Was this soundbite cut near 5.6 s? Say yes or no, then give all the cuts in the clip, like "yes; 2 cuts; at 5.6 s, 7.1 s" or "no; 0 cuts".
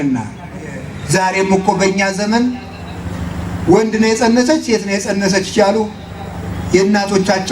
no; 1 cut; at 0.9 s